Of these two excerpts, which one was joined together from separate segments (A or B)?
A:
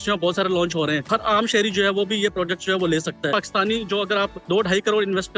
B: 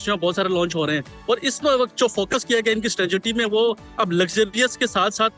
A